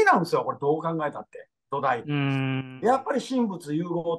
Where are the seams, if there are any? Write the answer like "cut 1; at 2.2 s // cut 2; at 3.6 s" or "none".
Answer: cut 1; at 2.7 s

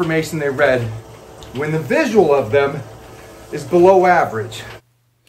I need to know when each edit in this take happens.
none

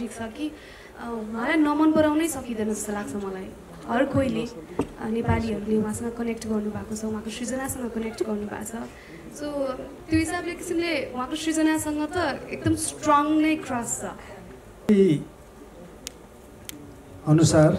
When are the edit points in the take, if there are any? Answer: cut 1; at 14.9 s

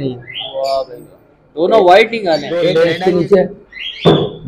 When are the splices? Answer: cut 1; at 2.6 s

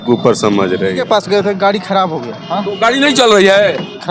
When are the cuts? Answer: cut 1; at 1.0 s

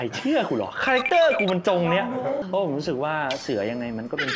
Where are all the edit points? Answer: cut 1; at 2.4 s

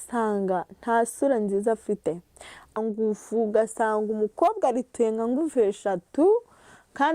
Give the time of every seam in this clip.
cut 1; at 2.7 s

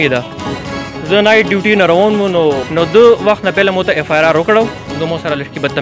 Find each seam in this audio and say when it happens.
cut 1; at 2.6 s // cut 2; at 4.9 s

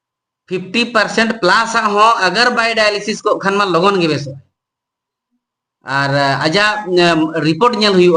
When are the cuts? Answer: none

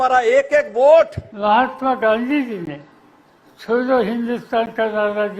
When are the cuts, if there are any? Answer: cut 1; at 1.2 s

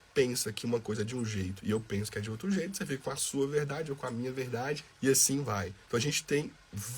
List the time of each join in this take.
cut 1; at 4.9 s // cut 2; at 5.8 s

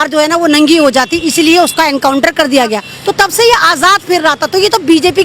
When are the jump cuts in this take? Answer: cut 1; at 2.9 s

